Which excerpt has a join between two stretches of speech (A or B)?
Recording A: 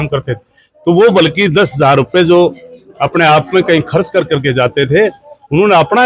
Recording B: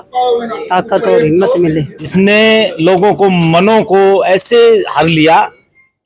B